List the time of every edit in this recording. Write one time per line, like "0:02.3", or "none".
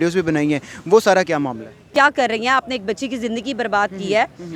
0:01.9